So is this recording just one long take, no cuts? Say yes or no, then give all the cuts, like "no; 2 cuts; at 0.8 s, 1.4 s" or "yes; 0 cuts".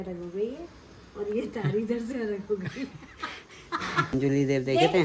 no; 1 cut; at 4.1 s